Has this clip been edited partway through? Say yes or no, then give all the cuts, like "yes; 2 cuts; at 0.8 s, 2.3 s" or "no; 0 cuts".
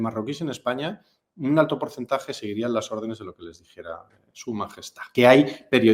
yes; 1 cut; at 5.0 s